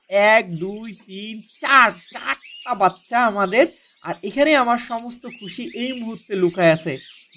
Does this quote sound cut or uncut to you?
uncut